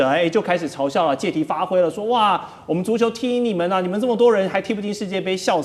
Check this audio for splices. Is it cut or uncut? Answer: uncut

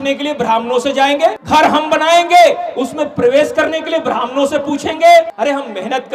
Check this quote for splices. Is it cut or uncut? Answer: cut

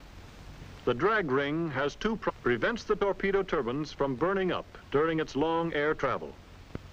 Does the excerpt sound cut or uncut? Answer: uncut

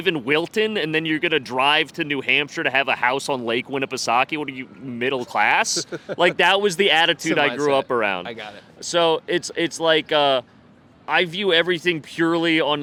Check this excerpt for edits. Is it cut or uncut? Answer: uncut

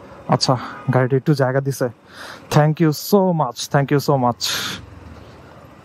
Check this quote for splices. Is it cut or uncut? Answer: uncut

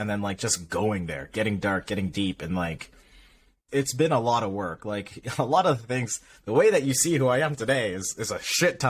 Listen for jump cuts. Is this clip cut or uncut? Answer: cut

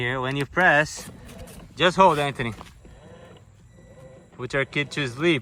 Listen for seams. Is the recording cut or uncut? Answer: uncut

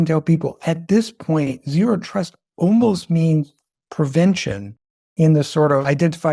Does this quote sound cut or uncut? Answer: uncut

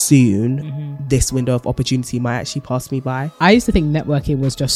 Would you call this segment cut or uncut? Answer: cut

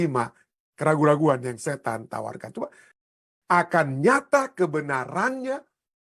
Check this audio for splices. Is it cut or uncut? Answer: cut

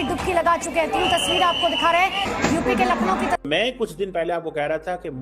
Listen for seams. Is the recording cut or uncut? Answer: cut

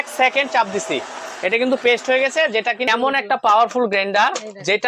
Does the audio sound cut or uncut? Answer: cut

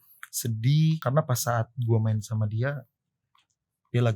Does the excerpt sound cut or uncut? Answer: cut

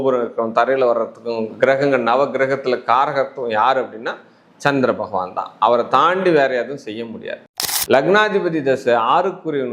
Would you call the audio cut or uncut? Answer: cut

